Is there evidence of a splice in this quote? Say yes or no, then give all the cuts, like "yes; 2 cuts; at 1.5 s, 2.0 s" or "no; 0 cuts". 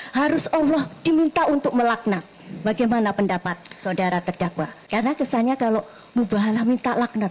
yes; 1 cut; at 4.8 s